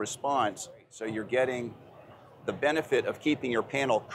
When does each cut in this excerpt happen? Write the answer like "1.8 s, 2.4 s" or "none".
0.9 s